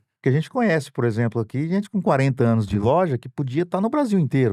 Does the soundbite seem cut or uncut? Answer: uncut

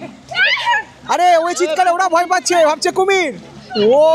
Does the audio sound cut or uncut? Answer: uncut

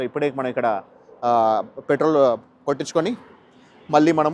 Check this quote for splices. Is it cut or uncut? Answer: uncut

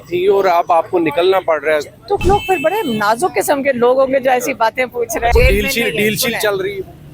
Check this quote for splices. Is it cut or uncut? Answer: cut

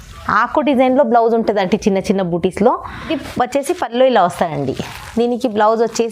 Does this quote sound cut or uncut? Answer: cut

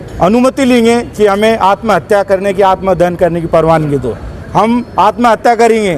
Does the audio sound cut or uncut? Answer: uncut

